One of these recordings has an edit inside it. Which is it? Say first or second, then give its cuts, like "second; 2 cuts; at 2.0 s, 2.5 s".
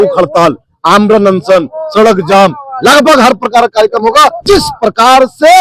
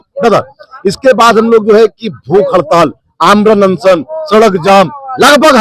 first; 1 cut; at 4.4 s